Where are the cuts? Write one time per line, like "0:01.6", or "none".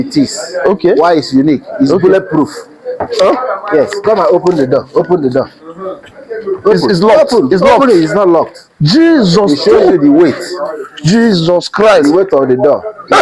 none